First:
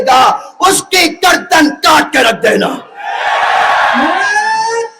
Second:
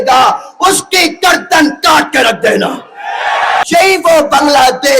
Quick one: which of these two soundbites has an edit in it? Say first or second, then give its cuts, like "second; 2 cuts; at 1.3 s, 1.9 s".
second; 1 cut; at 3.6 s